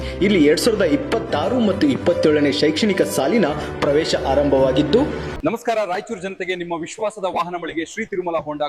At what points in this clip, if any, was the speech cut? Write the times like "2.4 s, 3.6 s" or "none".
5.3 s

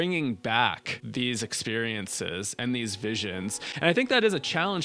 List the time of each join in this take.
0.9 s

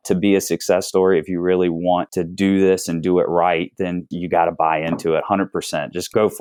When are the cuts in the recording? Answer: none

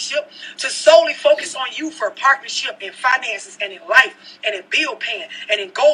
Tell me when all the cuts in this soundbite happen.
none

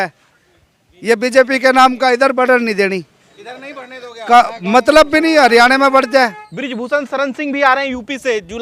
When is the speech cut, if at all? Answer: 6.5 s

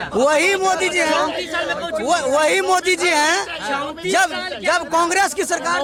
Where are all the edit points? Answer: none

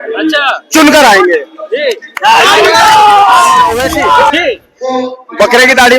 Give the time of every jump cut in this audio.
4.3 s

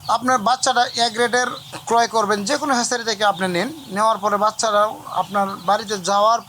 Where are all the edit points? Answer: none

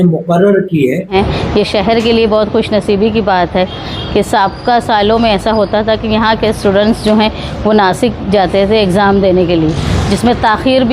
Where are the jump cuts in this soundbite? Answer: 1.1 s

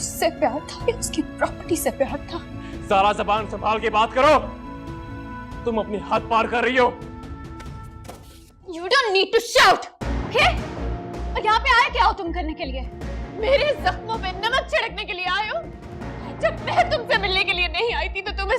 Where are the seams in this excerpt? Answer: none

